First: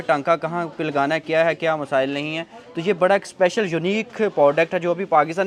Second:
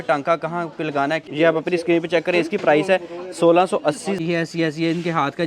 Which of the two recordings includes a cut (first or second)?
second